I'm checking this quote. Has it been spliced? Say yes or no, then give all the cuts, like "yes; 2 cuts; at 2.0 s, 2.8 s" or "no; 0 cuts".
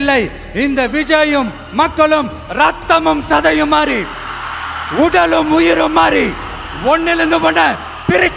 no; 0 cuts